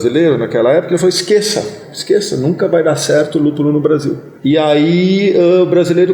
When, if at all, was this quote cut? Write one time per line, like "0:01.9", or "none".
0:04.3